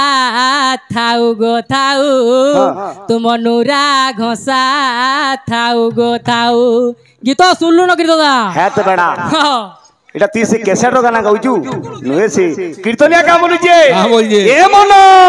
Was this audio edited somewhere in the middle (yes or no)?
no